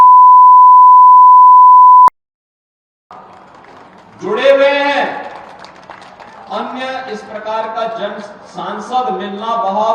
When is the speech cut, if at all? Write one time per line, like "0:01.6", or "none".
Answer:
0:02.0